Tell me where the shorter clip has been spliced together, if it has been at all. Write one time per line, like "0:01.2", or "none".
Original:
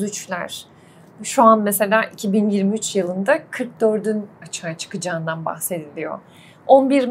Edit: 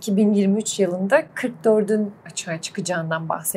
none

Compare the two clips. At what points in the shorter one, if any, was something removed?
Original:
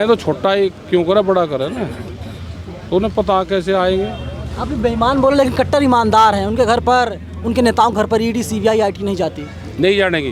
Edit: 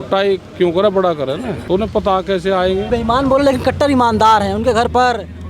0:01.6
0:02.9

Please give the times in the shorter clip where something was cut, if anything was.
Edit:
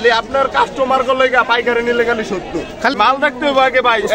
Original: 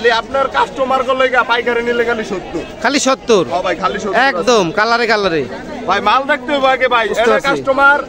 0:02.9

